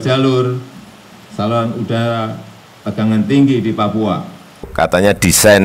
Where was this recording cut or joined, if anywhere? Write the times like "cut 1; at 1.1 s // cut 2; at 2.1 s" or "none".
cut 1; at 4.7 s